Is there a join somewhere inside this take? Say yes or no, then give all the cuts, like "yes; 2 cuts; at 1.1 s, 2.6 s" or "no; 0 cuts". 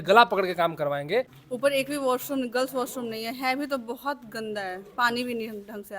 yes; 1 cut; at 1.4 s